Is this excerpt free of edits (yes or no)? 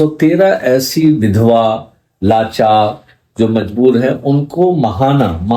yes